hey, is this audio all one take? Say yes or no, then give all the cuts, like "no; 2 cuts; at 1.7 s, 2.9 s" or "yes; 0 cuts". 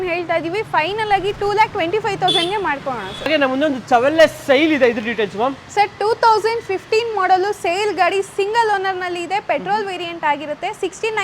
yes; 0 cuts